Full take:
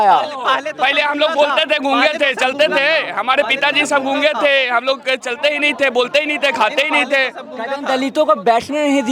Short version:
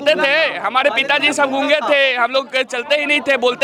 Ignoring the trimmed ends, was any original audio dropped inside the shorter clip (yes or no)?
no